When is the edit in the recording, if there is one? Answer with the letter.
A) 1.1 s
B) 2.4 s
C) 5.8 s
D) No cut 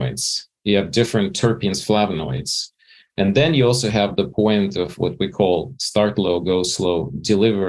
A